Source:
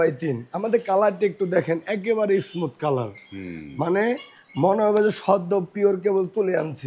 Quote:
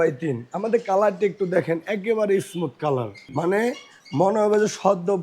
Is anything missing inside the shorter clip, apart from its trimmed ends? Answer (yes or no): yes